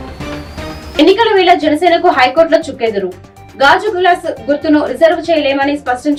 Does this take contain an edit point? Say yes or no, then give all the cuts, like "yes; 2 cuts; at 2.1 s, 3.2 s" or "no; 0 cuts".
no; 0 cuts